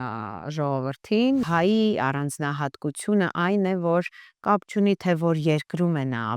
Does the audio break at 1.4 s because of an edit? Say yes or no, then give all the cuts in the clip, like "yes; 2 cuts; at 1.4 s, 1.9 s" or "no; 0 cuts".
yes; 1 cut; at 1.4 s